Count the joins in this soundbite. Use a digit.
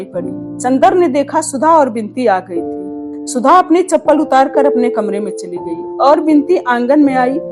0